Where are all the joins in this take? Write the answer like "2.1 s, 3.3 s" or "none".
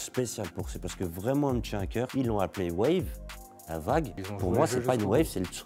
2.1 s, 4.2 s